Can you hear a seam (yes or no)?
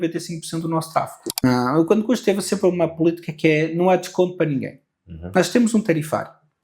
yes